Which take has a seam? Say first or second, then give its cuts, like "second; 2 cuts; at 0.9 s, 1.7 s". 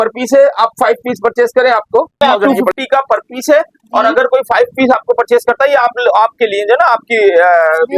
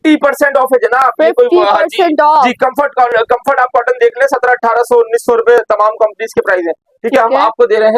first; 1 cut; at 2.2 s